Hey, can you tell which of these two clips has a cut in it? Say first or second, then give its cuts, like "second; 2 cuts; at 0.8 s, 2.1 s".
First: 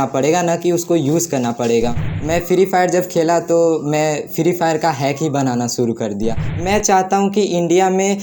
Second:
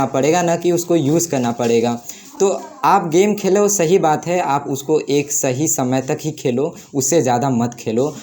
first; 2 cuts; at 2.1 s, 6.5 s